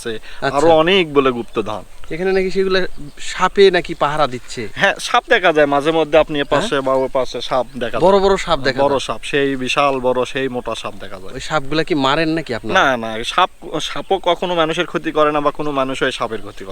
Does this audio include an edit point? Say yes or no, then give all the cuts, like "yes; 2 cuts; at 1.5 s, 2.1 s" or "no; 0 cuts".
no; 0 cuts